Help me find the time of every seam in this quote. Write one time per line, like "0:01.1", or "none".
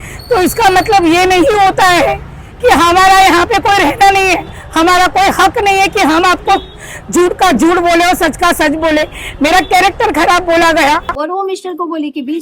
0:11.1